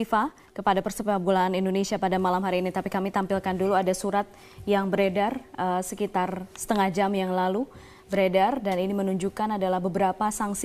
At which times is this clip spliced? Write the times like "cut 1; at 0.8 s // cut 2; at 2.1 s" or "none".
none